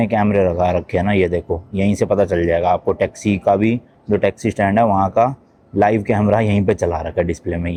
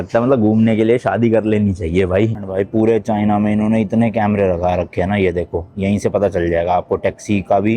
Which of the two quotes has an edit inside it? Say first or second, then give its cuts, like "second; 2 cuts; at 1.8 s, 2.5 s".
second; 1 cut; at 2.4 s